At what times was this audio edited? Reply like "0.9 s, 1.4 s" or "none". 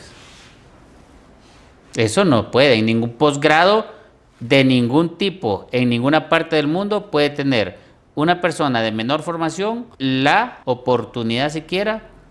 9.9 s, 10.5 s